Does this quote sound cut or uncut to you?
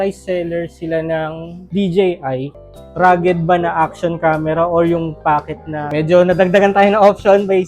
cut